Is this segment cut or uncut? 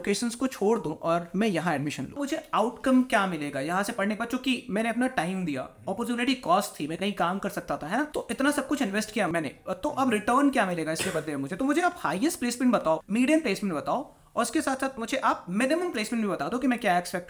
cut